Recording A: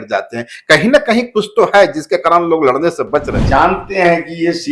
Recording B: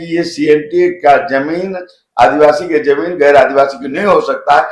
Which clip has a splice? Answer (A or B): A